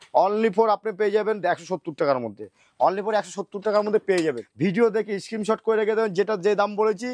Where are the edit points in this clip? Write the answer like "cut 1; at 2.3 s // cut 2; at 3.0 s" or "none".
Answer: cut 1; at 4.5 s